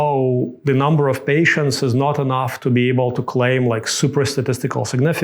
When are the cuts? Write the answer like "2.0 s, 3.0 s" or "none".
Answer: none